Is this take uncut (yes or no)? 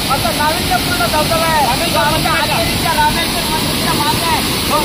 yes